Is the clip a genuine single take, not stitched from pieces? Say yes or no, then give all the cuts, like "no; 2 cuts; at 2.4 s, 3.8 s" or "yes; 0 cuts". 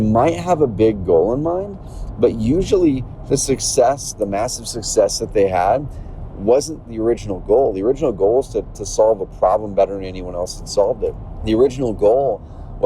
no; 2 cuts; at 6.9 s, 11.3 s